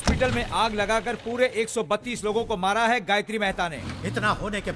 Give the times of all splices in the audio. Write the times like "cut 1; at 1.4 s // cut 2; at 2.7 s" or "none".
cut 1; at 3.7 s